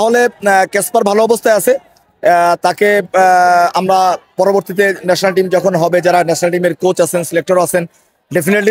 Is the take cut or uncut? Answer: uncut